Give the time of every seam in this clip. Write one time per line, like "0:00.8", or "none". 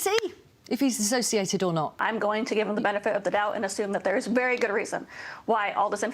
0:02.0